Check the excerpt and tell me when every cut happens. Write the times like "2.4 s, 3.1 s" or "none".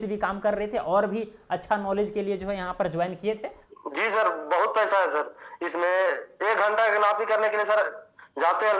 3.7 s